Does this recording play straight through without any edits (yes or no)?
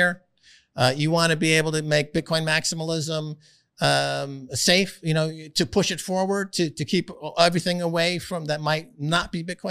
yes